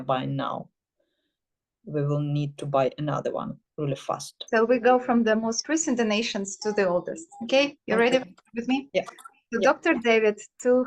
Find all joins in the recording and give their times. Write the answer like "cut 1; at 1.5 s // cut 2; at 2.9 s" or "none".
cut 1; at 4.3 s